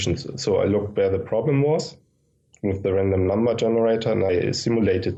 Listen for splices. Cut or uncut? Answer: uncut